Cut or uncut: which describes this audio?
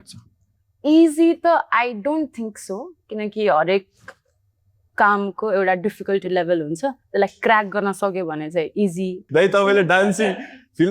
cut